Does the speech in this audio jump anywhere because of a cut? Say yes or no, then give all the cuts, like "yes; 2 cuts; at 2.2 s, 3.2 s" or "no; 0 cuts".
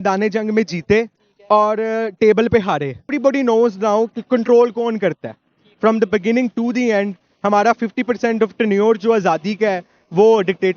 yes; 1 cut; at 3.1 s